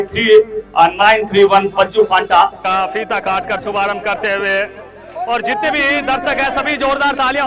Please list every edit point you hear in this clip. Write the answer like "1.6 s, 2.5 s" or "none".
2.6 s